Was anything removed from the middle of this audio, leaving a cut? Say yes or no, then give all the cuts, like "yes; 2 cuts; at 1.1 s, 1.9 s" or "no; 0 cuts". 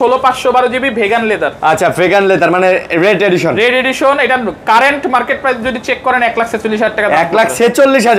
no; 0 cuts